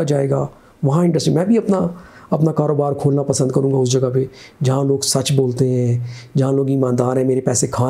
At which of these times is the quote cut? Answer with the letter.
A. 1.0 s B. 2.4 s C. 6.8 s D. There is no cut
D